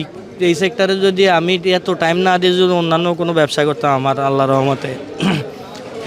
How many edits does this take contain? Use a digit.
0